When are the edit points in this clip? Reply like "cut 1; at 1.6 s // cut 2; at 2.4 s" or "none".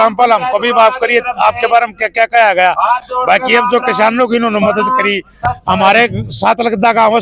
none